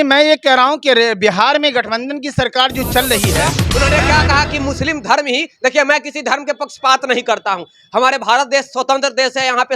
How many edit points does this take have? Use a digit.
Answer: 1